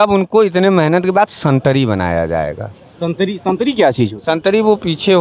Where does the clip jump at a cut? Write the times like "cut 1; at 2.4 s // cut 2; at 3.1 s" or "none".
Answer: none

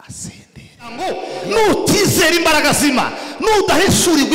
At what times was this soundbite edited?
cut 1; at 1.0 s

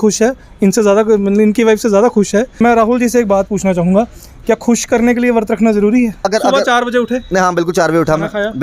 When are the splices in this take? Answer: cut 1; at 2.6 s // cut 2; at 6.3 s

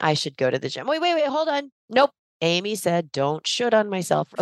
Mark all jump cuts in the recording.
cut 1; at 2.3 s

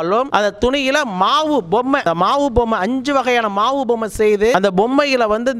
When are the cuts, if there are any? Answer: cut 1; at 4.5 s

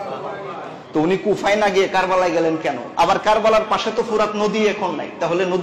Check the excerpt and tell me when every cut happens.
cut 1; at 2.8 s

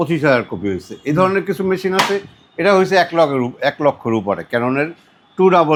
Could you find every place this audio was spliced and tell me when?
none

